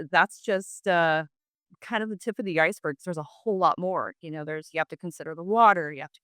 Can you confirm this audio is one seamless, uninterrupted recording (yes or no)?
yes